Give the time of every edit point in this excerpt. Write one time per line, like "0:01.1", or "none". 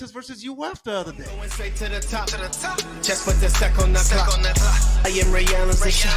0:01.3